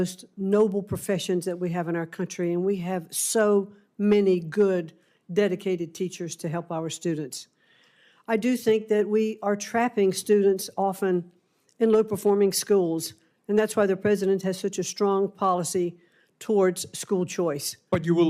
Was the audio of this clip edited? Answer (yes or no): no